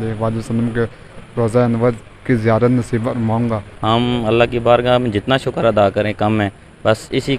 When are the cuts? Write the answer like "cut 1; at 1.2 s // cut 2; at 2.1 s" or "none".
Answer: cut 1; at 3.7 s